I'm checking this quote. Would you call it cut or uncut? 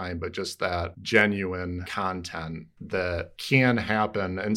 cut